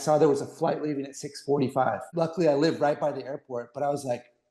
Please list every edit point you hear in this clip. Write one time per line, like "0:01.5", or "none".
0:02.1